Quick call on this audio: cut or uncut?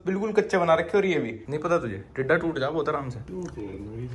cut